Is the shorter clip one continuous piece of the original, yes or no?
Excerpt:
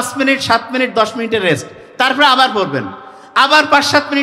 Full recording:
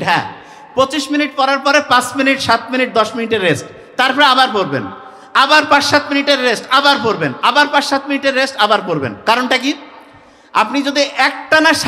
yes